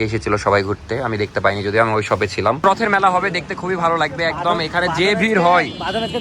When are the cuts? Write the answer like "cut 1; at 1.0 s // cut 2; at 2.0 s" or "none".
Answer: cut 1; at 2.6 s